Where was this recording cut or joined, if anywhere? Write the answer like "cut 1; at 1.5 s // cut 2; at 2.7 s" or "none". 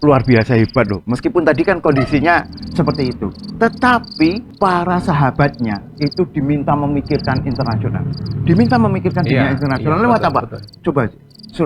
cut 1; at 4.5 s